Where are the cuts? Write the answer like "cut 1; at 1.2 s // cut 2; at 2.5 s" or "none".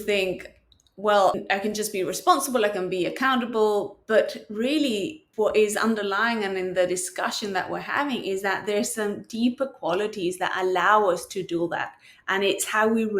cut 1; at 1.4 s // cut 2; at 5.2 s